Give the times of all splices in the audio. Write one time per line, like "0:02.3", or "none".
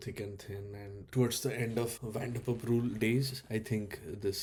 none